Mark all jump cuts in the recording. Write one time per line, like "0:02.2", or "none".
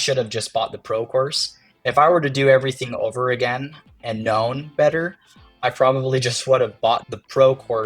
0:03.9